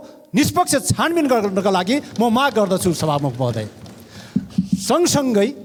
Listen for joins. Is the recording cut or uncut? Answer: uncut